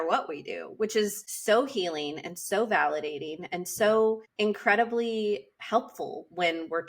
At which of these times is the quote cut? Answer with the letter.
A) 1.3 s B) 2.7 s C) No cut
A